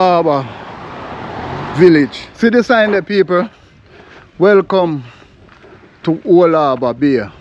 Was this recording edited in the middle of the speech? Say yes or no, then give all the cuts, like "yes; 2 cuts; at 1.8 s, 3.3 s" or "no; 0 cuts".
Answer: yes; 1 cut; at 2.3 s